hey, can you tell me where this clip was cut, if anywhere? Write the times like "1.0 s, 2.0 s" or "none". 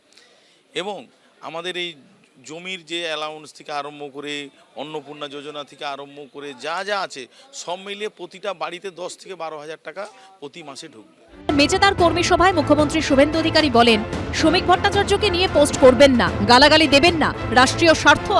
11.5 s